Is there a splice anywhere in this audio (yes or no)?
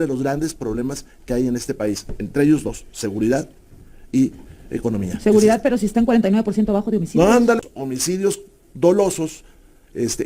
yes